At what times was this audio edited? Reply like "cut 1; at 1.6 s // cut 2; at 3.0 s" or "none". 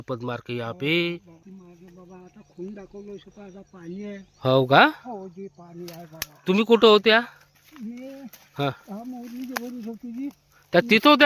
cut 1; at 1.4 s